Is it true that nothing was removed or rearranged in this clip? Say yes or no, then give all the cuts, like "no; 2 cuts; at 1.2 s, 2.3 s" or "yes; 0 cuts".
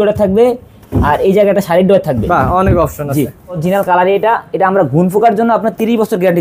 no; 1 cut; at 3.6 s